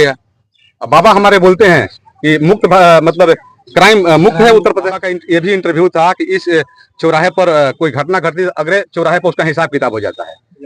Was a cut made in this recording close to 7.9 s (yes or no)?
no